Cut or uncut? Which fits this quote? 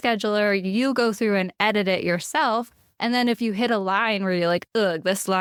uncut